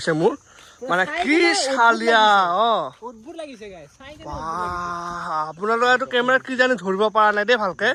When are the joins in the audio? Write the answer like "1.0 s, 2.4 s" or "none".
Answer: none